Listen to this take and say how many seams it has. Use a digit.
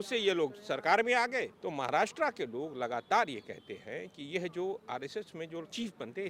1